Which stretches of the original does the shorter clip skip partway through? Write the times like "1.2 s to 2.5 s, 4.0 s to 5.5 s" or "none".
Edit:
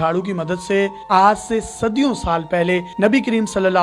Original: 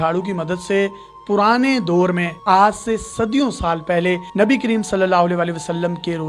1.0 s to 2.4 s